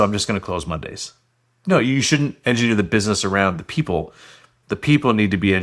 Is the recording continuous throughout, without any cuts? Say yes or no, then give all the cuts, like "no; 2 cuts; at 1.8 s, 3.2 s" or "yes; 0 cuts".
yes; 0 cuts